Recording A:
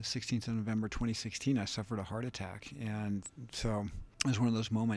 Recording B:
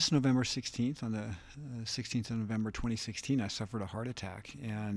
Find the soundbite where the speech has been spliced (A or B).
A